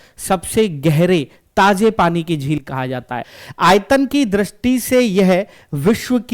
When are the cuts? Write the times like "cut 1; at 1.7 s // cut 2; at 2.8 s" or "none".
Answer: cut 1; at 3.3 s

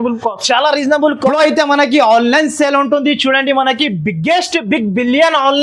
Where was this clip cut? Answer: cut 1; at 1.2 s

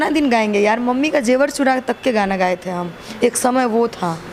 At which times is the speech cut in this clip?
none

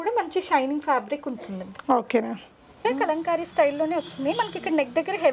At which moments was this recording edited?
cut 1; at 2.8 s

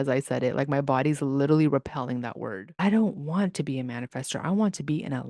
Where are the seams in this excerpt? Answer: cut 1; at 2.4 s

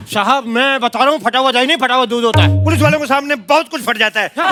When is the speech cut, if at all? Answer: none

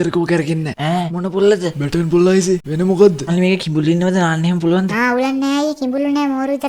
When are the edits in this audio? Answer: cut 1; at 3.3 s

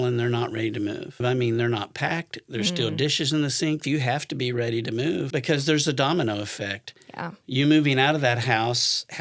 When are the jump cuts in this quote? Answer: cut 1; at 1.2 s // cut 2; at 3.8 s // cut 3; at 5.3 s

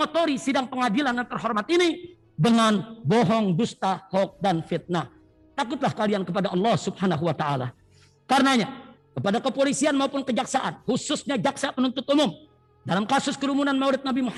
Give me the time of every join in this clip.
none

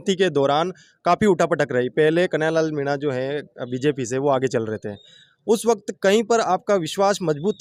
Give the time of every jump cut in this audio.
none

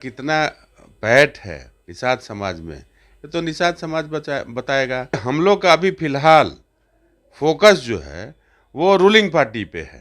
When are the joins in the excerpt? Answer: cut 1; at 5.2 s

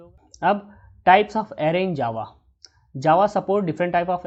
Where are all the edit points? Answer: none

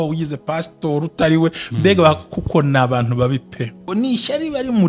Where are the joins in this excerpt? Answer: cut 1; at 3.8 s

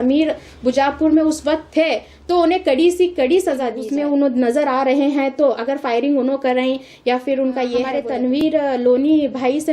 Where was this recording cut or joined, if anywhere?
cut 1; at 4.3 s // cut 2; at 8.1 s

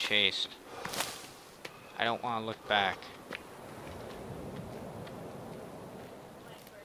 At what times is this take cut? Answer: none

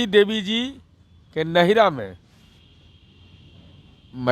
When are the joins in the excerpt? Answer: none

